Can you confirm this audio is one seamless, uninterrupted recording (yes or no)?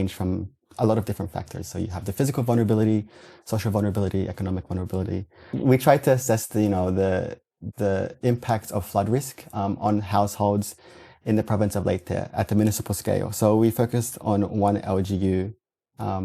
no